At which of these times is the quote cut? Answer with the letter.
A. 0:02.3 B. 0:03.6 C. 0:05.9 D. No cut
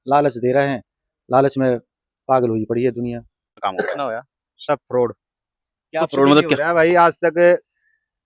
B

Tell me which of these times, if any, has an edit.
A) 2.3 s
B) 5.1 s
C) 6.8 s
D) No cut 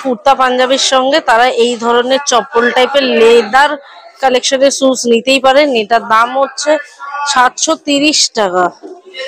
D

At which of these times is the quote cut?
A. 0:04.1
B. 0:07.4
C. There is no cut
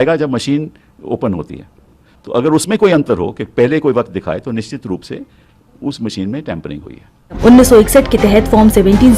B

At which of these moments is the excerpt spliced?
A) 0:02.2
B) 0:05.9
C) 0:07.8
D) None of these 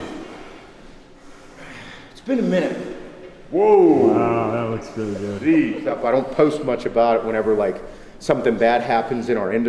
B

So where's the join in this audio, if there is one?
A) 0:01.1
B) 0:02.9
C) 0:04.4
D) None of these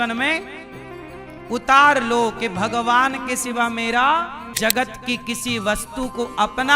C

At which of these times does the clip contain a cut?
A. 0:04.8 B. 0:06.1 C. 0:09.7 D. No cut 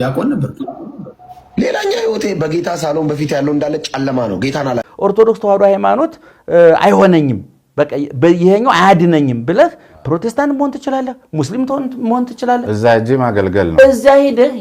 A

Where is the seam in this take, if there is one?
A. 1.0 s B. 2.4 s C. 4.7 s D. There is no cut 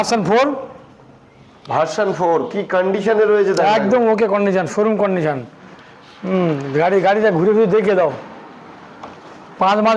D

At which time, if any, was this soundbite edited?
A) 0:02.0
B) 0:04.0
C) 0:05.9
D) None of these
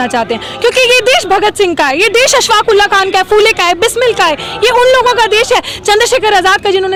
D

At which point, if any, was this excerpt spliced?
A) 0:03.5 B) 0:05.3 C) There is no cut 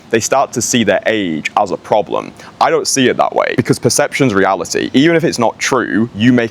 A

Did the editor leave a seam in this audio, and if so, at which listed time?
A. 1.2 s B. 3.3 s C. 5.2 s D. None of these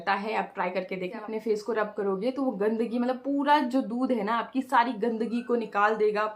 A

